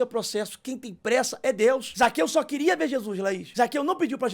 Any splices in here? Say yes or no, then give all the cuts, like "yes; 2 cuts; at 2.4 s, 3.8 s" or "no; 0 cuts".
yes; 2 cuts; at 1.9 s, 3.4 s